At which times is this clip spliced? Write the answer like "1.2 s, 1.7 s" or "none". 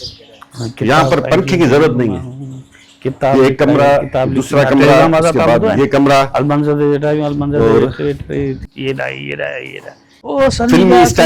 8.7 s, 10.2 s